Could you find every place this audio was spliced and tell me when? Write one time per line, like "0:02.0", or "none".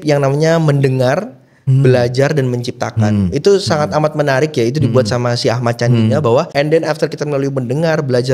0:06.5